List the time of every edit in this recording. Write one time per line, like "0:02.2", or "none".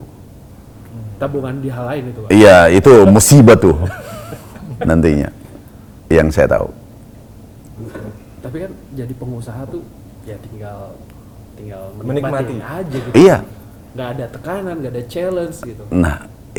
none

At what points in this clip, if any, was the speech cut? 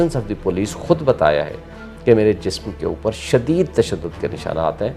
none

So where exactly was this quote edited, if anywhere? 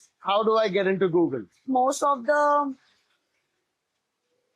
0:01.6

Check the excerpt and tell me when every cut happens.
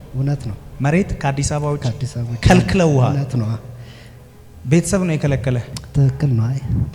0:05.8

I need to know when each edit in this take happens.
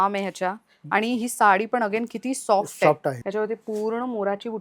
0:03.2

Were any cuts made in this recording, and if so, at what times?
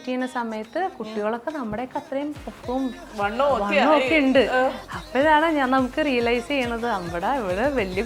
none

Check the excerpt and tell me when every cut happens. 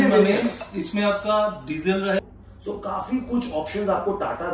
0:02.2

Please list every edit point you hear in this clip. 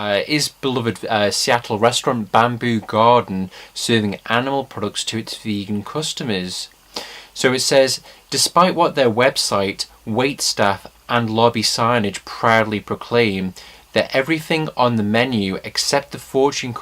0:02.9

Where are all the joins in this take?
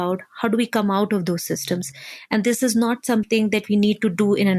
none

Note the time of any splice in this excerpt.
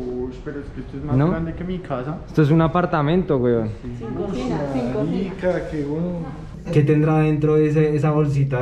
0:06.6

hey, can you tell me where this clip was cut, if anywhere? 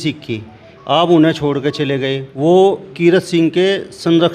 0:02.2

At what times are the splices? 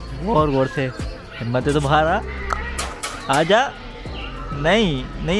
none

